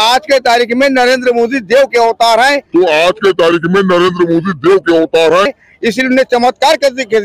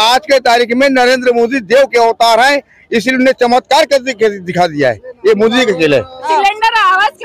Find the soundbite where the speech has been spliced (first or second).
second